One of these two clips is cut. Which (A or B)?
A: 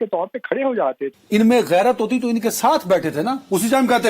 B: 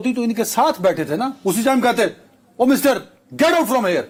A